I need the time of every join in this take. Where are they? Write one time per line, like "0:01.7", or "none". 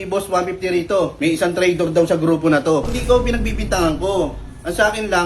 0:01.1
0:03.0